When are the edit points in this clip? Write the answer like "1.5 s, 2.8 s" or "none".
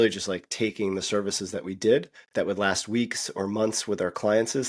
2.2 s